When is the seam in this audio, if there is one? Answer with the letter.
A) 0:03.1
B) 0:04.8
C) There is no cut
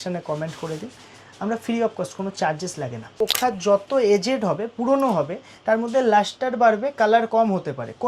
A